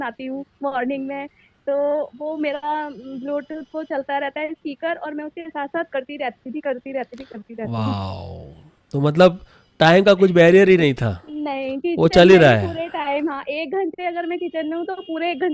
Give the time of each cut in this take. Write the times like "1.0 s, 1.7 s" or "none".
none